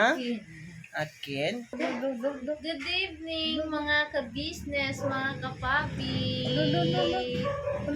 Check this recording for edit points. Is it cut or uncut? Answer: cut